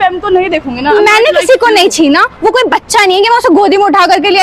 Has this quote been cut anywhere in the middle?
no; 0 cuts

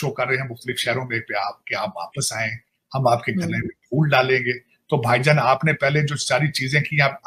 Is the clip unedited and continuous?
yes; 0 cuts

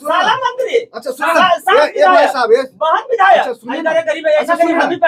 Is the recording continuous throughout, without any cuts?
yes; 0 cuts

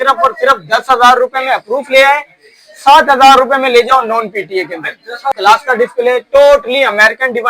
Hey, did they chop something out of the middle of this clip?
yes; 1 cut; at 5.4 s

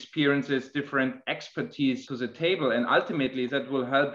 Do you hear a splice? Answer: yes; 1 cut; at 2.1 s

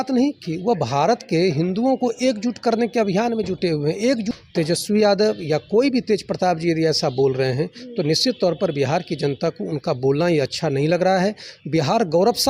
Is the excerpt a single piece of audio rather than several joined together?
no; 1 cut; at 4.3 s

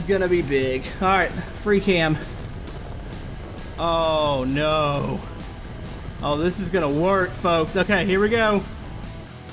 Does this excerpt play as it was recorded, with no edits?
yes; 0 cuts

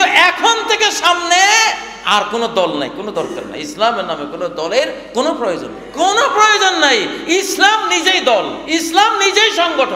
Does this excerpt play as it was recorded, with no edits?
no; 2 cuts; at 5.8 s, 8.6 s

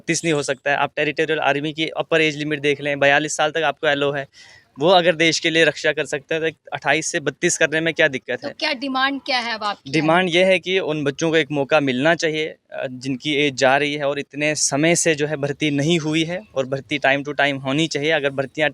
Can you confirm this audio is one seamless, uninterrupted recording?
yes; 0 cuts

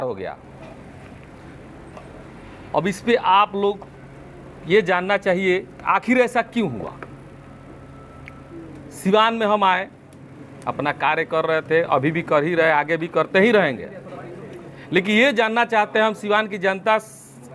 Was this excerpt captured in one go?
yes; 0 cuts

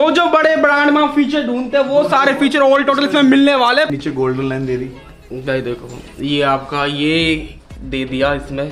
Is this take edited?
yes; 1 cut; at 3.9 s

